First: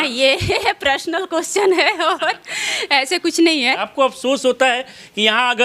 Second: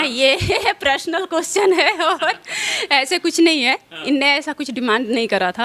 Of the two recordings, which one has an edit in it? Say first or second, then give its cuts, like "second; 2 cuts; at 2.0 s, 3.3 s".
first; 1 cut; at 3.8 s